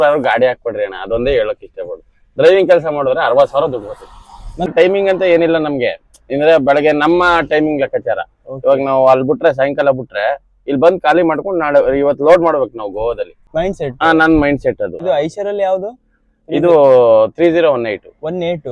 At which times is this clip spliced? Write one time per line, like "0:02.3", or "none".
0:04.7
0:13.4
0:15.0